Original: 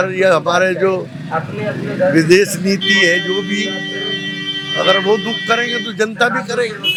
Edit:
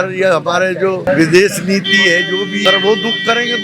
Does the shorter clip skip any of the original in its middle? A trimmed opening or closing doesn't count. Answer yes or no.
yes